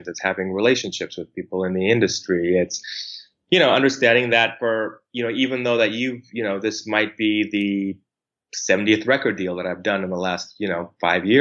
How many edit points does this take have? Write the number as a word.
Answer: zero